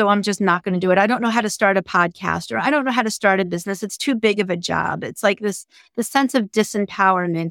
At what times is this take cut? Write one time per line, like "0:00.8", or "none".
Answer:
none

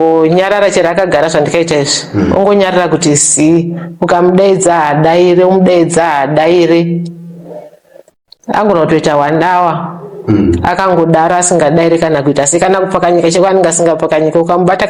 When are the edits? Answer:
none

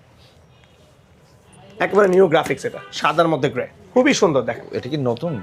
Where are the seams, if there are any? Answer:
0:01.4
0:04.6

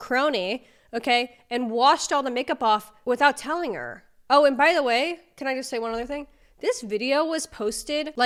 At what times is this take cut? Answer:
none

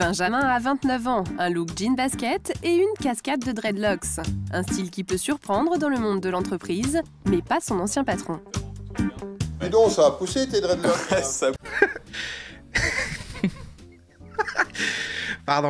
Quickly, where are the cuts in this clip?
none

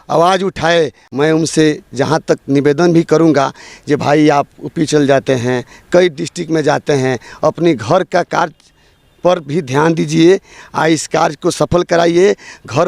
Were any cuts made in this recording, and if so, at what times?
0:01.0

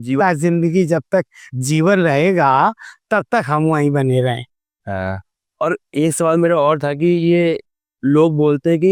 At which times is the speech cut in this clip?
none

